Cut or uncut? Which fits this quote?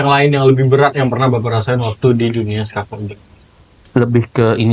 uncut